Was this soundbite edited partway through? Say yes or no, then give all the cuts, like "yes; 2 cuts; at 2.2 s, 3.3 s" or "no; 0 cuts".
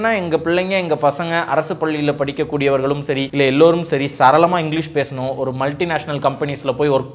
yes; 1 cut; at 3.3 s